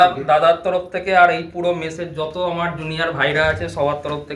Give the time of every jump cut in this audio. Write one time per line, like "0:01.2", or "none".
none